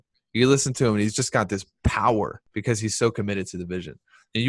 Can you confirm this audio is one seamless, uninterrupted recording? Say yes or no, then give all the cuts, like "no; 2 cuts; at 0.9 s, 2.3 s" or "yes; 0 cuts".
no; 1 cut; at 2.4 s